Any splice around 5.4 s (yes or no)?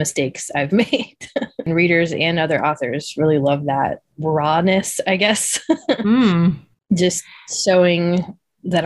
no